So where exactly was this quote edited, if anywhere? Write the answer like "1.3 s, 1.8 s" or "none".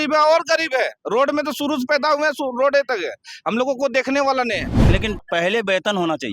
4.8 s